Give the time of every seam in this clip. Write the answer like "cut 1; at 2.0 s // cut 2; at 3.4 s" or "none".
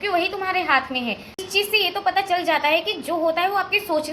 cut 1; at 1.3 s